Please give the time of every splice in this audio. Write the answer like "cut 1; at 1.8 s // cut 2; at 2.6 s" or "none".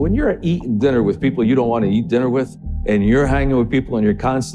none